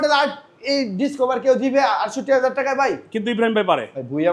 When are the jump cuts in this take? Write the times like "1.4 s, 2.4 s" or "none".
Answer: none